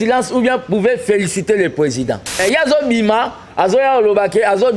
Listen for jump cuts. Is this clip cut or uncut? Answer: cut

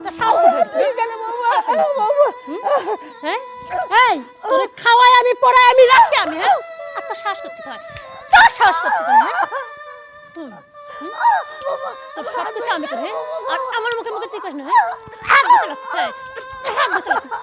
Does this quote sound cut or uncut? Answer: cut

